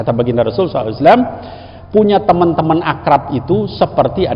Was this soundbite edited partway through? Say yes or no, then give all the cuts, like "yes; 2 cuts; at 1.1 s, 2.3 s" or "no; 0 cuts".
no; 0 cuts